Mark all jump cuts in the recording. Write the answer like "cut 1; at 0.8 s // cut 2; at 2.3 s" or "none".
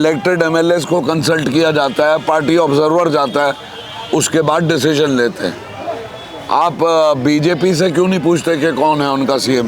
none